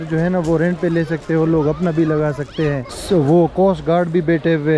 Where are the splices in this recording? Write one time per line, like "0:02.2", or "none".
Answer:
0:02.9